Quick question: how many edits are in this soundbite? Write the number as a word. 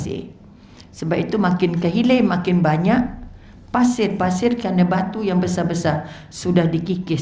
zero